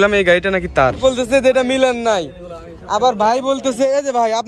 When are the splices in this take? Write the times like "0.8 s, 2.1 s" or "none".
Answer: 1.0 s